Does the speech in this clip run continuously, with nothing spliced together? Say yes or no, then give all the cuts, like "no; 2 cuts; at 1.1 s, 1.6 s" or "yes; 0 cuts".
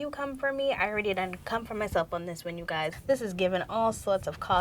no; 1 cut; at 2.9 s